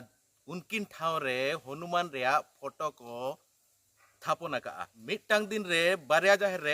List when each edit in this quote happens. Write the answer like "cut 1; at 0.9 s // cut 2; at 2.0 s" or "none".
cut 1; at 5.0 s